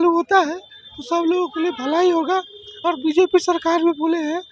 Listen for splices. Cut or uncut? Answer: uncut